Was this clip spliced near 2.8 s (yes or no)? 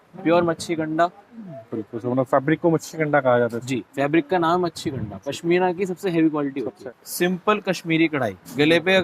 no